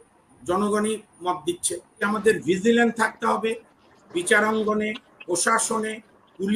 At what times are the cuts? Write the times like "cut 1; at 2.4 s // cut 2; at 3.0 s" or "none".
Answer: cut 1; at 2.0 s